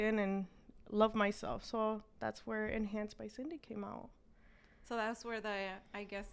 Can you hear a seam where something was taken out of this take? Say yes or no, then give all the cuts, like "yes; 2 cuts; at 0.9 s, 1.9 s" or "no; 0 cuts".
no; 0 cuts